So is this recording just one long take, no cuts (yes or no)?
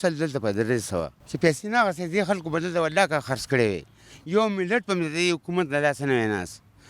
no